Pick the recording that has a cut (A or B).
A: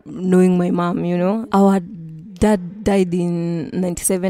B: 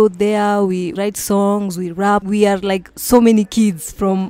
B